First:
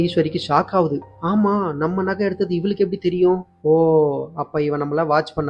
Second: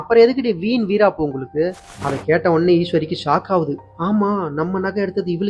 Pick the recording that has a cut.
second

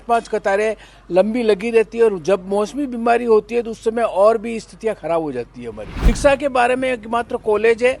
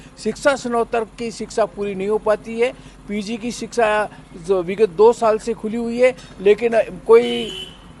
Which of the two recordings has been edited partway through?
first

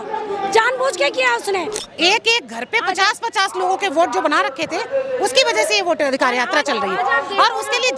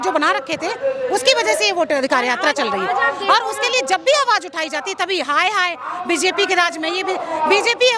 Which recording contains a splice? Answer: first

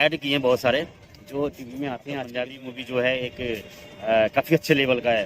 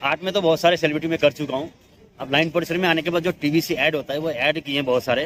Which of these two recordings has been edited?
first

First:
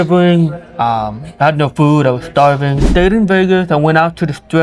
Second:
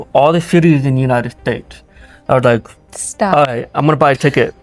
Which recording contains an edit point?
first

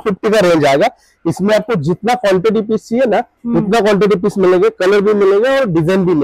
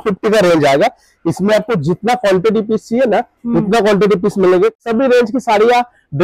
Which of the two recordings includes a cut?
second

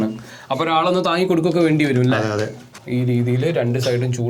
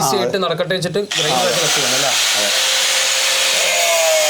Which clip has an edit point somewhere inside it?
first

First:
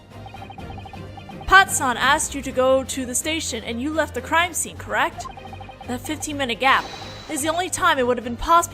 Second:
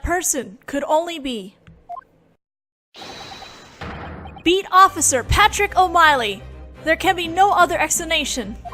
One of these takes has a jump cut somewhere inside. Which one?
first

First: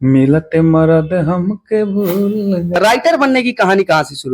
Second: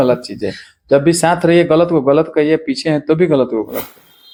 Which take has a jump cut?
first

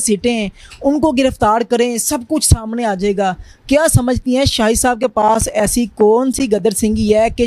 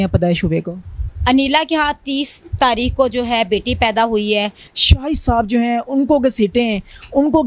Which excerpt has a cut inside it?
second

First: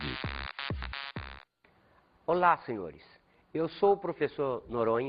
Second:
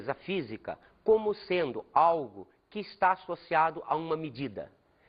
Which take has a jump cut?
second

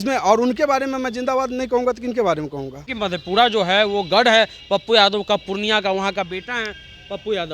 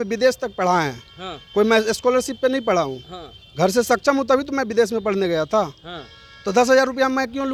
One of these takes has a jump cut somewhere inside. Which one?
first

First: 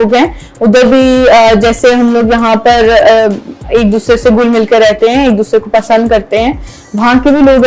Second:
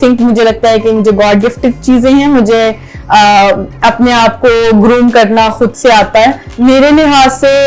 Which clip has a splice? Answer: second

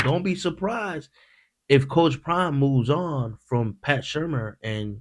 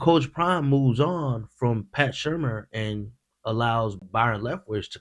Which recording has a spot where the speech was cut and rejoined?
second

